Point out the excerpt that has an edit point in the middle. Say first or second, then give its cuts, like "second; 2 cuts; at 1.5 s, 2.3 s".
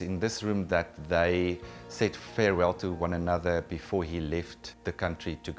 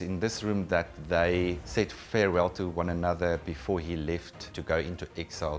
second; 2 cuts; at 1.6 s, 4.5 s